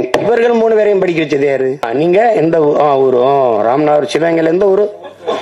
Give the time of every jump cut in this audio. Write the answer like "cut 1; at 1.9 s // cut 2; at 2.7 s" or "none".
cut 1; at 1.9 s